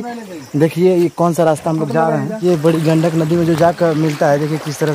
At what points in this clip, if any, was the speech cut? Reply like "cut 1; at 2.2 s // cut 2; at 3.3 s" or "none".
cut 1; at 2.4 s